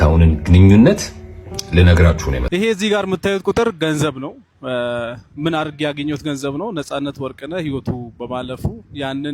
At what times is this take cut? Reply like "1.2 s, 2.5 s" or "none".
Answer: 2.4 s